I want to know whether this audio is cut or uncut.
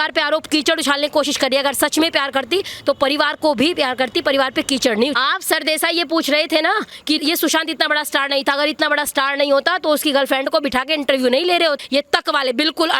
cut